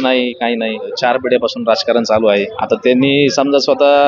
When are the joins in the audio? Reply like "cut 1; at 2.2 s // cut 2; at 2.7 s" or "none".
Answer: cut 1; at 0.9 s // cut 2; at 2.5 s